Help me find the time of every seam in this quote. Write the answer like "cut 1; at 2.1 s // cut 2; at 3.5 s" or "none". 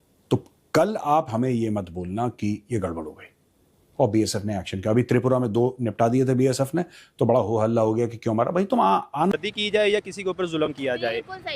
cut 1; at 9.3 s